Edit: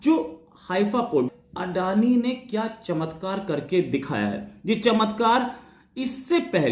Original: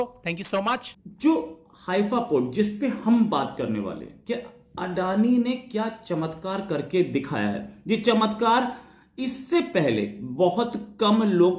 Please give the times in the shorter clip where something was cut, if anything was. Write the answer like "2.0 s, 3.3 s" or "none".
1.3 s